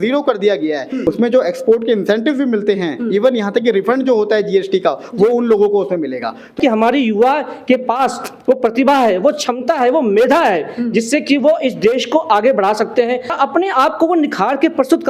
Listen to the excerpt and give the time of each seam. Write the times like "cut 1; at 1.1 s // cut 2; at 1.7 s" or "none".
cut 1; at 0.9 s // cut 2; at 6.5 s // cut 3; at 13.4 s